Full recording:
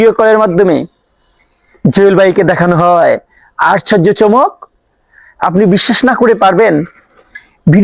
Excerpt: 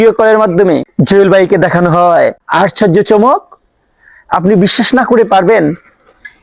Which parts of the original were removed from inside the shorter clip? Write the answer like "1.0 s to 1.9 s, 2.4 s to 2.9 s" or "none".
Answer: 0.9 s to 1.7 s, 3.3 s to 3.5 s